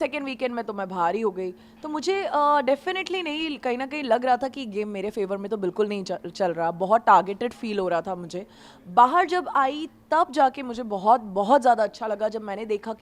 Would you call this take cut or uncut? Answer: uncut